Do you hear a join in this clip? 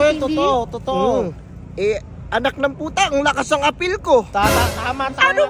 no; 0 cuts

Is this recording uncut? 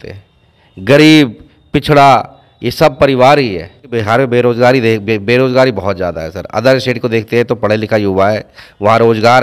no; 1 cut; at 4.0 s

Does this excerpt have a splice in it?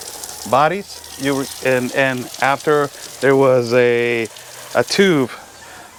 no; 0 cuts

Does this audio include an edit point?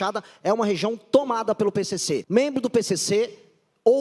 yes; 1 cut; at 2.2 s

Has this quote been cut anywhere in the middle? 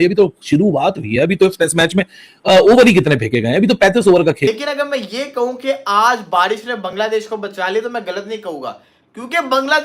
yes; 1 cut; at 4.5 s

